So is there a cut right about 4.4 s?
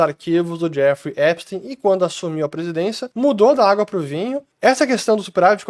yes; 2 cuts; at 3.0 s, 4.4 s

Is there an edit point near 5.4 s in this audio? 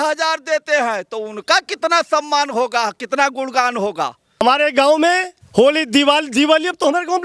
yes; 2 cuts; at 4.4 s, 5.4 s

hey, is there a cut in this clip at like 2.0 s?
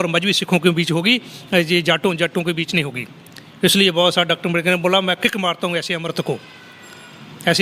no; 0 cuts

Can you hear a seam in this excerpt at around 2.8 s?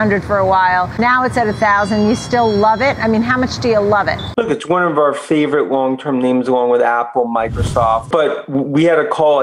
no; 3 cuts; at 0.9 s, 4.2 s, 8.1 s

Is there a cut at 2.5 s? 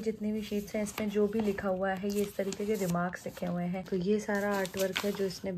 no; 1 cut; at 3.8 s

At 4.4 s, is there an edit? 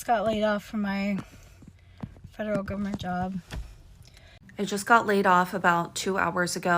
yes; 1 cut; at 4.4 s

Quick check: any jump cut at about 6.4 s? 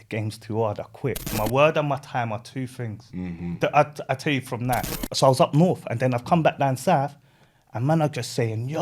no; 2 cuts; at 1.3 s, 5.0 s

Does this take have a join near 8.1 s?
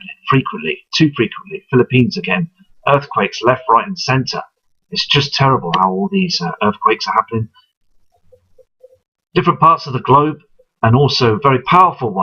yes; 1 cut; at 8.1 s

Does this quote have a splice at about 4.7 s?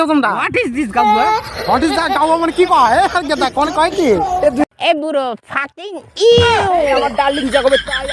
yes; 1 cut; at 4.7 s

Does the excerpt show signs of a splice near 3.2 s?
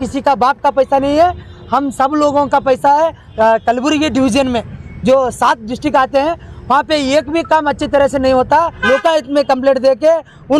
yes; 2 cuts; at 3.2 s, 8.8 s

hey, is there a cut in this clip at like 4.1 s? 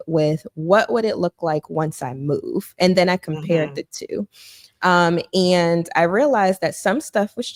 no; 0 cuts

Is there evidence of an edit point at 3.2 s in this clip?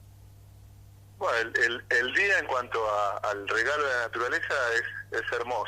yes; 1 cut; at 3.2 s

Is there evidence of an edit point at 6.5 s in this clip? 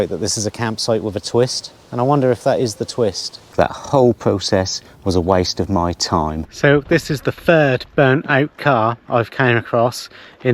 yes; 2 cuts; at 3.5 s, 6.5 s

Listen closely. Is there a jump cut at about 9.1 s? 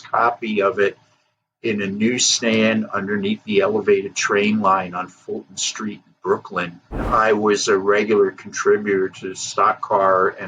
no; 1 cut; at 7.0 s

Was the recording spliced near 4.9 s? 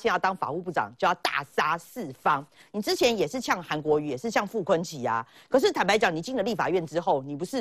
no; 1 cut; at 2.5 s

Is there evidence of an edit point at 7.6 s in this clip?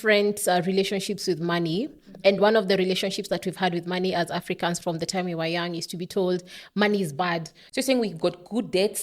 yes; 1 cut; at 7.6 s

